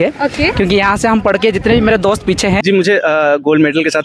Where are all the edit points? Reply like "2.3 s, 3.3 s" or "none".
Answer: 2.6 s